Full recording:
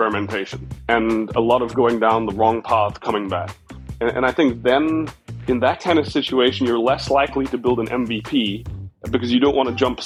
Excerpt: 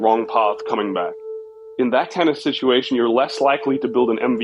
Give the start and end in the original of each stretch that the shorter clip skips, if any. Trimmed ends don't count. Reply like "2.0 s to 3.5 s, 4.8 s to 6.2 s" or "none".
3.8 s to 5.2 s